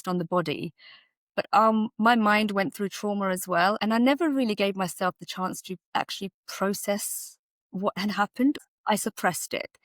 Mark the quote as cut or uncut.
cut